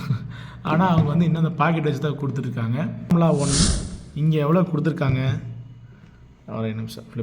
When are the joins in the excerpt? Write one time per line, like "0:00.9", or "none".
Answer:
0:03.1

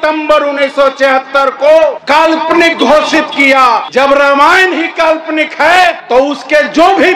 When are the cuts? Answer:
0:02.2
0:03.9
0:06.0

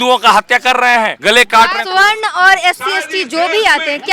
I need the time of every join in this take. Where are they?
0:01.2
0:01.8

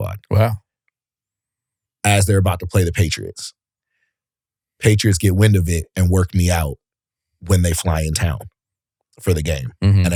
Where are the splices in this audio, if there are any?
none

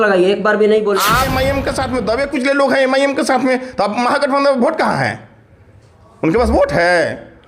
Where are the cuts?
0:01.2

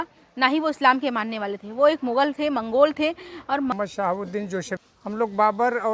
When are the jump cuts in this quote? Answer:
0:03.7
0:04.8

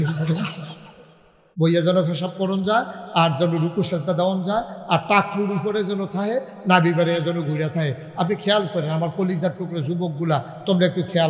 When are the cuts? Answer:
0:01.4

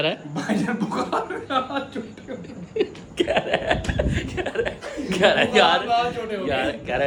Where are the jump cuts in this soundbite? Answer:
none

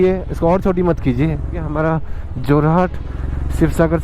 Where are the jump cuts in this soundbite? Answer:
0:01.7

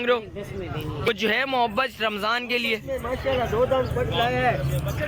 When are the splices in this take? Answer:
0:01.1

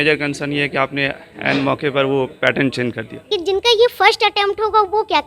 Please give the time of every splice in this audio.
0:03.1

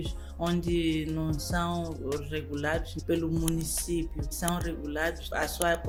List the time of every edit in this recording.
none

